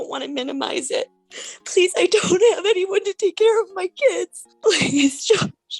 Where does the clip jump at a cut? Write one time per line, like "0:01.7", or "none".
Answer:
0:01.2
0:04.4